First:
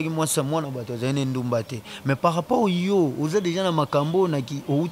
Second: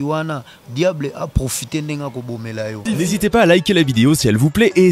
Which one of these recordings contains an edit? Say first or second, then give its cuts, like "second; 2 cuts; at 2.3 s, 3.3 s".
second; 1 cut; at 2.8 s